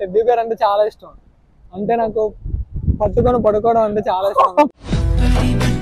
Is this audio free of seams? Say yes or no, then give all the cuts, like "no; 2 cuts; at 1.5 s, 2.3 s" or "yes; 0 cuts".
yes; 0 cuts